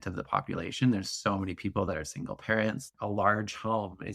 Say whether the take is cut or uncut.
cut